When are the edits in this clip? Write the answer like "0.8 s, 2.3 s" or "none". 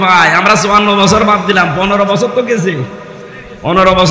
none